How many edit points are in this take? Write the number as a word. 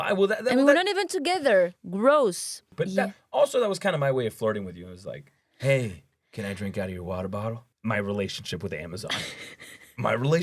two